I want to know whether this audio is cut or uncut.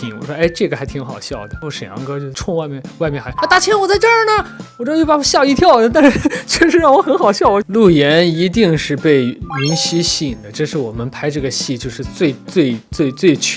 cut